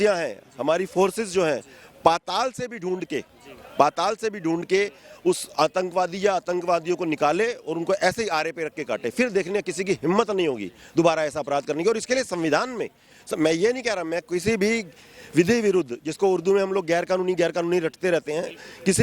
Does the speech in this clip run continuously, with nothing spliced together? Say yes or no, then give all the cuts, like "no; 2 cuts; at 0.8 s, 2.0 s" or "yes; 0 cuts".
yes; 0 cuts